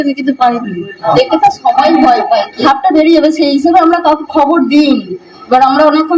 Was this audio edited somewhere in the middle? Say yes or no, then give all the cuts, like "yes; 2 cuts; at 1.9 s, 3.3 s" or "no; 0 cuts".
yes; 2 cuts; at 1.0 s, 2.6 s